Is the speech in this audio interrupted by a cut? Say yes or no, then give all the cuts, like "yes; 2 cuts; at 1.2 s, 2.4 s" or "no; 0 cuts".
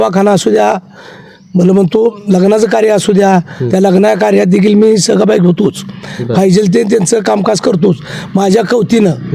no; 0 cuts